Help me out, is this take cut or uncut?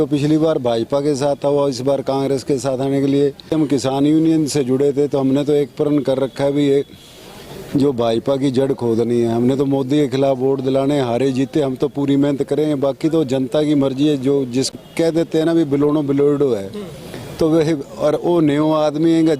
cut